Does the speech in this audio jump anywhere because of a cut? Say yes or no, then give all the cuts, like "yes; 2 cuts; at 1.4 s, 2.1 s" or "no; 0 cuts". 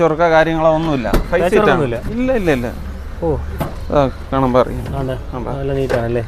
no; 0 cuts